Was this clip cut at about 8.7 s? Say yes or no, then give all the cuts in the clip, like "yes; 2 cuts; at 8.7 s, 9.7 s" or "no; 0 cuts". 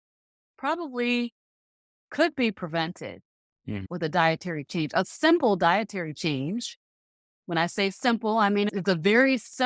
yes; 2 cuts; at 3.8 s, 8.7 s